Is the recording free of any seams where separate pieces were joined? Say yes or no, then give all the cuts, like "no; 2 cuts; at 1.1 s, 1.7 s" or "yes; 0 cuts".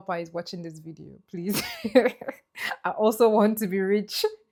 yes; 0 cuts